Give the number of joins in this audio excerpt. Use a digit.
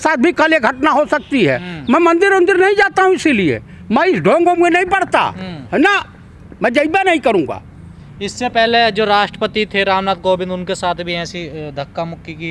0